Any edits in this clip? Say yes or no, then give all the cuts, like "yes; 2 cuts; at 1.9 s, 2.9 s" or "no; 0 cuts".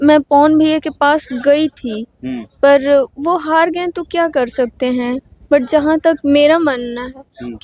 no; 0 cuts